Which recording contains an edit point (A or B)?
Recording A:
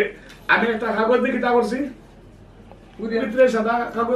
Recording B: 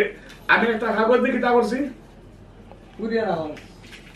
A